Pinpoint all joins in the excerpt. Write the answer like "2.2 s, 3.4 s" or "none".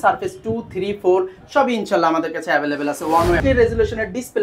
3.4 s